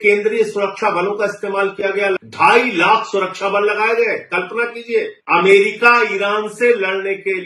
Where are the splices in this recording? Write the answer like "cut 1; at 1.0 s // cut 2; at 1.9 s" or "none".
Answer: cut 1; at 2.2 s // cut 2; at 5.2 s